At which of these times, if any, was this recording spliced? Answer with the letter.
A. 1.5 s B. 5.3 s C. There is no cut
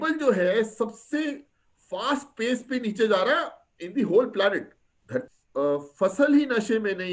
B